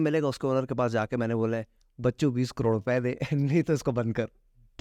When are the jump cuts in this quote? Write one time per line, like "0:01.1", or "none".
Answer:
none